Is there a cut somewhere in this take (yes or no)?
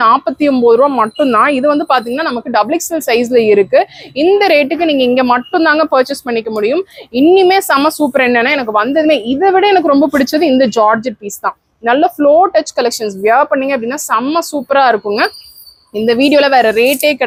no